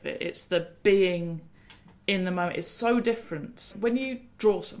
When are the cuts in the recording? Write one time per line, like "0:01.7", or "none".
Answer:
0:03.7